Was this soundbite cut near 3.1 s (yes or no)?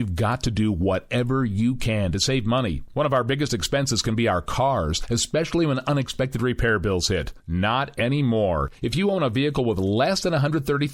no